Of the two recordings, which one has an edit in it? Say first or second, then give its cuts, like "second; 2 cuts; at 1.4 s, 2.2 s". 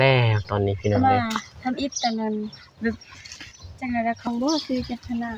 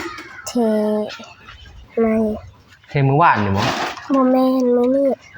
first; 1 cut; at 4.3 s